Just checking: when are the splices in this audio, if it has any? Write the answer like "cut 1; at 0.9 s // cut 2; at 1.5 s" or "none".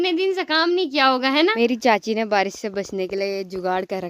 cut 1; at 1.5 s